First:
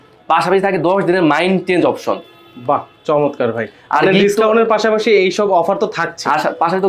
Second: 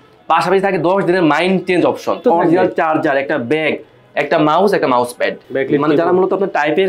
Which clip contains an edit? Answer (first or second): second